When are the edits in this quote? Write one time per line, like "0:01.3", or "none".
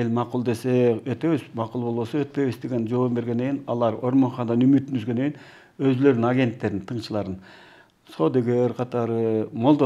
none